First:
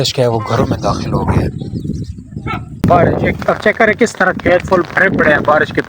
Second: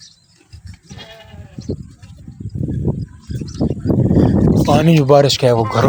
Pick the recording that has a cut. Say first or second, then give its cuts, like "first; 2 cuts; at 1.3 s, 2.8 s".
first; 1 cut; at 2.7 s